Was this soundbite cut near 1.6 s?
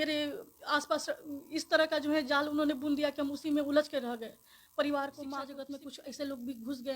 no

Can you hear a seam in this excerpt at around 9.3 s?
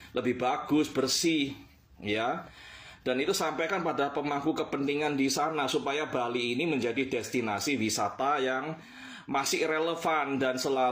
no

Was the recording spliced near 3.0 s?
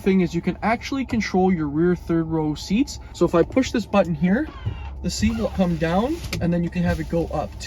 yes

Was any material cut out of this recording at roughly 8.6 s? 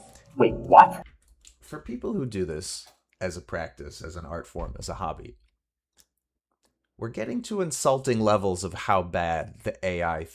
no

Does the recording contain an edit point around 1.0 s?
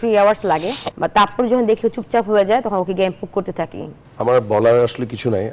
no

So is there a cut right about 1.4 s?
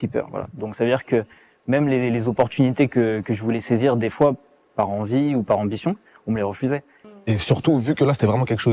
no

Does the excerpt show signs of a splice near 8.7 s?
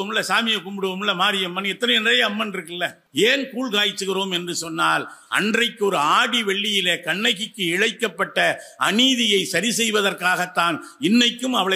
no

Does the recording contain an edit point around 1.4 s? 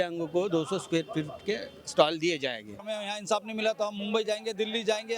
no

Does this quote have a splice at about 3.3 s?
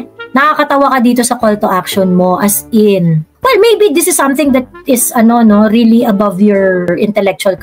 yes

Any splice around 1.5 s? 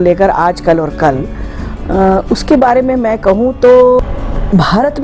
no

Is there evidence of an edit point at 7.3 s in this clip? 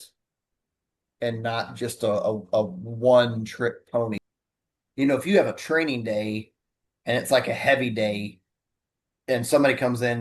no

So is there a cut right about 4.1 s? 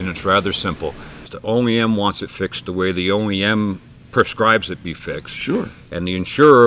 no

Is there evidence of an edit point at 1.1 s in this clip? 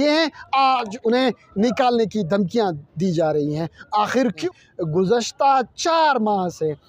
no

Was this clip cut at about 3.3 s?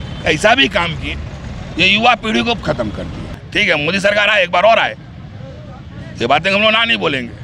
yes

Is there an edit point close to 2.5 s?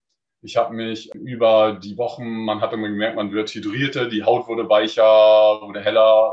no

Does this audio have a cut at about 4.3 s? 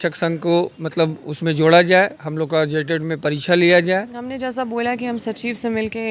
yes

